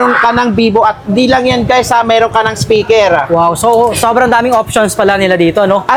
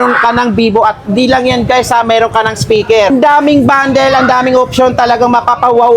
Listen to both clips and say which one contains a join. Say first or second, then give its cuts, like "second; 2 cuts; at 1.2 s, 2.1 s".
second; 1 cut; at 3.1 s